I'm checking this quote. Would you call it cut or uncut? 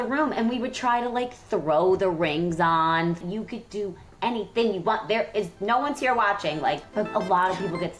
cut